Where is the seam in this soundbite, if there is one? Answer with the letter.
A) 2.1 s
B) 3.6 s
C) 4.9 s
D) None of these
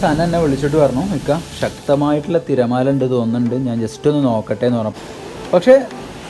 C